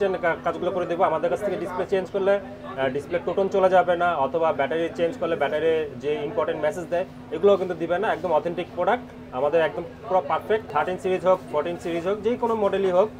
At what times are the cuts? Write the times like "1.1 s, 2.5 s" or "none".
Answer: 10.7 s